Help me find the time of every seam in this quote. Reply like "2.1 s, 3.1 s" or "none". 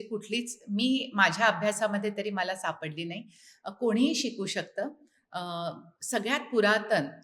none